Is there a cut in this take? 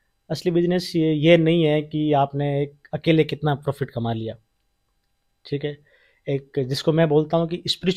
no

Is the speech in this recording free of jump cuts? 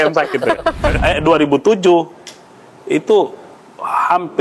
no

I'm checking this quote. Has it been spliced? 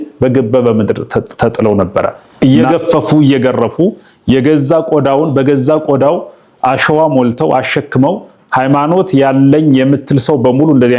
yes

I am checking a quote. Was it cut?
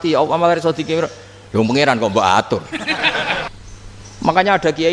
yes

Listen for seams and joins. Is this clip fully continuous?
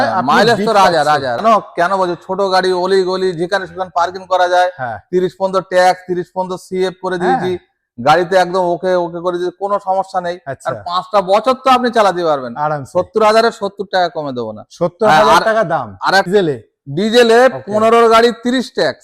no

